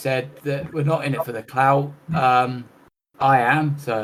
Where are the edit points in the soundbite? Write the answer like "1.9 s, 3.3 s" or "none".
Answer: none